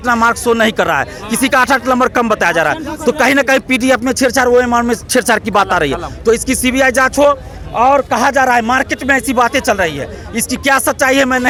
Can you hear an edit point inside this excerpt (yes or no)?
no